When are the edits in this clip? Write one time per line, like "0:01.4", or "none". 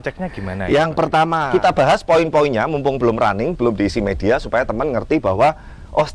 0:01.4